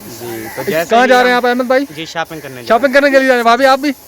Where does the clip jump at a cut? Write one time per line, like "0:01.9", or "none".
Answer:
none